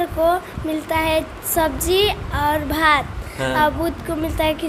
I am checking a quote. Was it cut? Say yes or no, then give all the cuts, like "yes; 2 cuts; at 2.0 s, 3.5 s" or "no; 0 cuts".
no; 0 cuts